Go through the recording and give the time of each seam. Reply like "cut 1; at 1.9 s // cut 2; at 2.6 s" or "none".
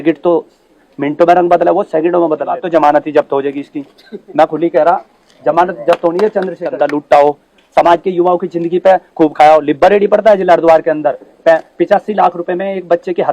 cut 1; at 2.6 s // cut 2; at 6.7 s

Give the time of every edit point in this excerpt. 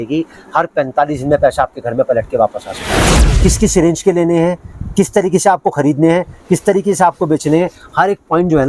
cut 1; at 3.2 s

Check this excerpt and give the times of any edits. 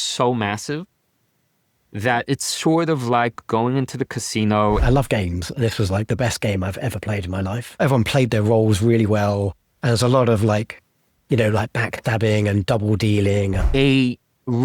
cut 1; at 4.8 s // cut 2; at 7.8 s // cut 3; at 13.6 s

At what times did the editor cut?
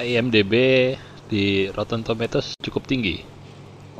cut 1; at 2.5 s

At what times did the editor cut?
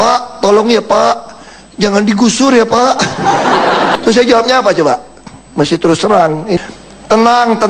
cut 1; at 3.9 s

